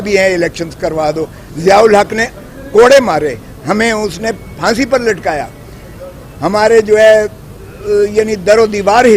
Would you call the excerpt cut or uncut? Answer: cut